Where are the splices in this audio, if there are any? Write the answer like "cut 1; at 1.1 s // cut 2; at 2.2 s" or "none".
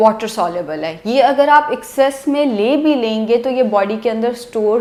none